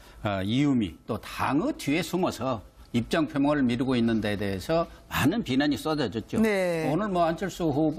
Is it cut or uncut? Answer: uncut